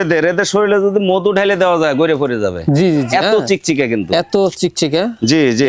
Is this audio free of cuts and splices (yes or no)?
yes